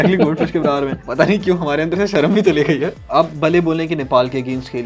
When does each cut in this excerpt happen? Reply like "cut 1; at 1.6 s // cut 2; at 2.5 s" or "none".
cut 1; at 1.0 s // cut 2; at 3.0 s